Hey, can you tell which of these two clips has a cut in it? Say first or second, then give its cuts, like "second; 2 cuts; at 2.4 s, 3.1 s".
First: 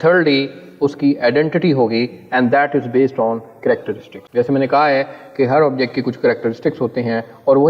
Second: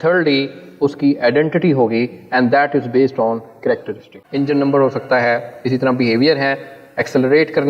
second; 1 cut; at 4.2 s